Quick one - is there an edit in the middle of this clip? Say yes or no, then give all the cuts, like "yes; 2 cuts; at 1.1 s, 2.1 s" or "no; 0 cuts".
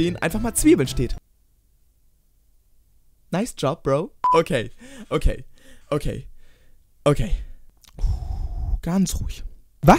yes; 1 cut; at 4.3 s